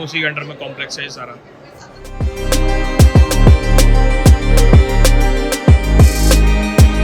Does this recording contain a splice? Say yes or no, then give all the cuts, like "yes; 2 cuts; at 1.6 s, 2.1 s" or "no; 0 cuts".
no; 0 cuts